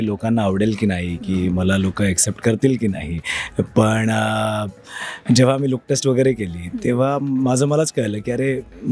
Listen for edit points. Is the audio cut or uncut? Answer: uncut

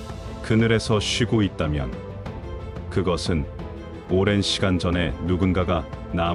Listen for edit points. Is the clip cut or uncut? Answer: uncut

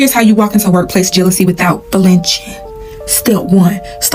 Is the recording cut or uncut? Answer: uncut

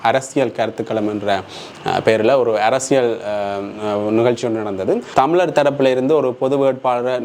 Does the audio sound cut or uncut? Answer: cut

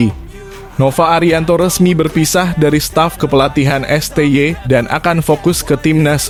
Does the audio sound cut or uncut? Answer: uncut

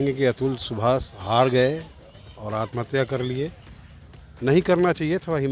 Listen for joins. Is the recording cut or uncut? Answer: uncut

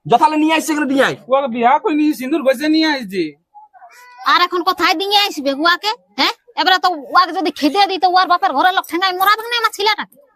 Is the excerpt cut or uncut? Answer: uncut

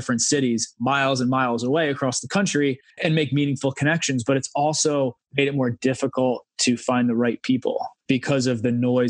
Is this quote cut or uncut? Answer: cut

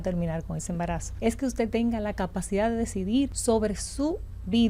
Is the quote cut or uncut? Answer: cut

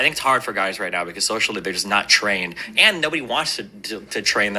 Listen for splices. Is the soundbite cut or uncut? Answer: uncut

